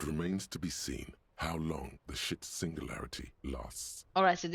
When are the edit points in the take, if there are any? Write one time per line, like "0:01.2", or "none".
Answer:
none